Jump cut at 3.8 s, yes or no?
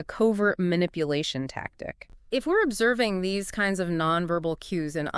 no